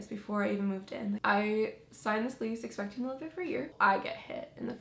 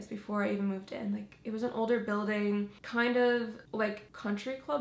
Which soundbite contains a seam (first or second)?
first